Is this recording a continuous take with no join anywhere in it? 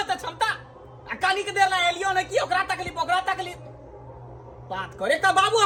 yes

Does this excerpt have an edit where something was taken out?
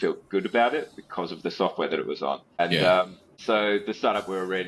yes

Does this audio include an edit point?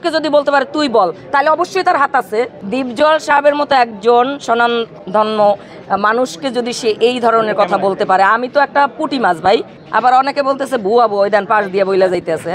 no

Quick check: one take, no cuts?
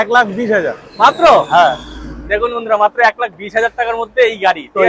yes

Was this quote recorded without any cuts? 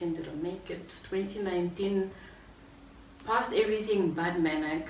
yes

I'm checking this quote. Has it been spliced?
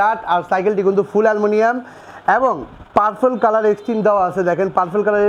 no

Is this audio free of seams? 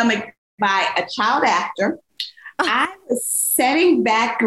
yes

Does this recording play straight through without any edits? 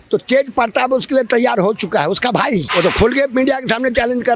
no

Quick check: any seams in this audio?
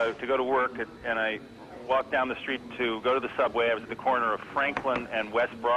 yes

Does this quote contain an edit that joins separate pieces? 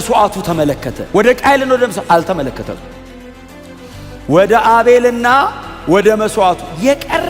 yes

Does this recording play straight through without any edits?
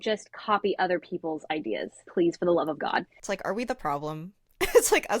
no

